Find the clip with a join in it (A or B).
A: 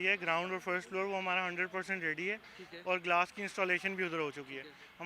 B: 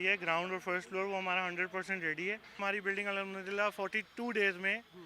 B